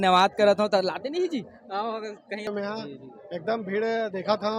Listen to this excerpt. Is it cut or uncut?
cut